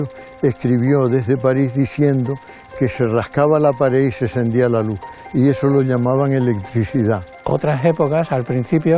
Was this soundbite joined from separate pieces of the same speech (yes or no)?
yes